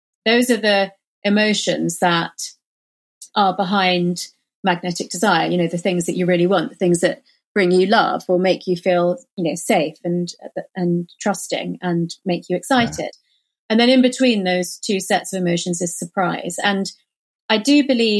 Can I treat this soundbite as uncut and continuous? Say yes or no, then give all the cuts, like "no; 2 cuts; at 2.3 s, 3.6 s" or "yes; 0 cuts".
yes; 0 cuts